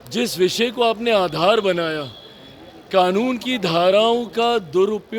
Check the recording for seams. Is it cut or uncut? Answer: uncut